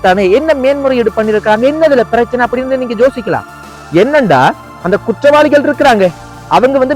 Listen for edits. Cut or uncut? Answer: uncut